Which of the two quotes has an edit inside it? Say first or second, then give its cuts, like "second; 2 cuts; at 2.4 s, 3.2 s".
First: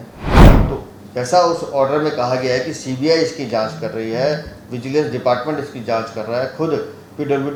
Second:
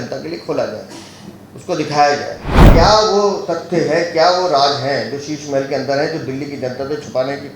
second; 1 cut; at 2.6 s